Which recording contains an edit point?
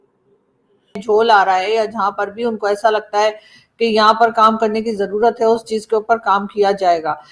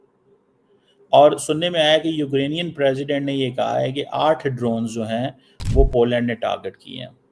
first; 1 cut; at 1.0 s

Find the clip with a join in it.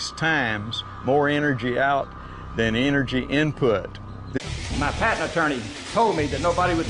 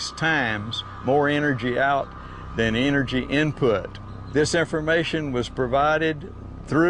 second; 1 cut; at 4.4 s

